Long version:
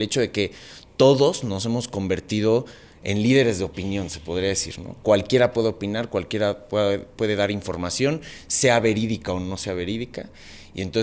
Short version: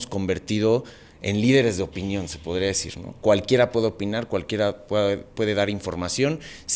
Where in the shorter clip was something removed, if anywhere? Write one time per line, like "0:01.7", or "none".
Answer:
none